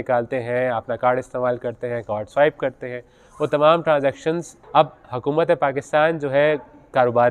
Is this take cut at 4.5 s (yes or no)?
yes